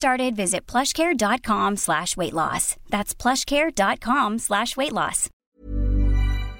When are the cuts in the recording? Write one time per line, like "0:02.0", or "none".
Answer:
0:05.2